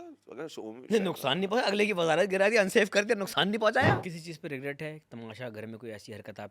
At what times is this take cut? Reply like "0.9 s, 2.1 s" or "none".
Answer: 4.0 s